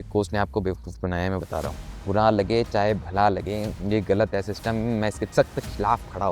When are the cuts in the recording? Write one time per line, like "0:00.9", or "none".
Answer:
0:01.9
0:03.7
0:05.2